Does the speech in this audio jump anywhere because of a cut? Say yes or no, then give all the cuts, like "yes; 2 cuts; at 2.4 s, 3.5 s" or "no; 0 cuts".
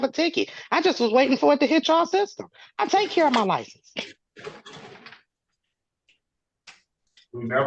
no; 0 cuts